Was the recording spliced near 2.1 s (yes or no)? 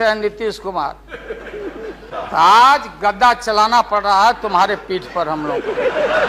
yes